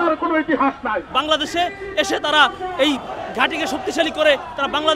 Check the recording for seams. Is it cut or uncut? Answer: cut